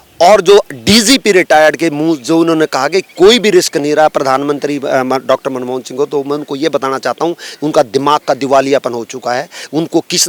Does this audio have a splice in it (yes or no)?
no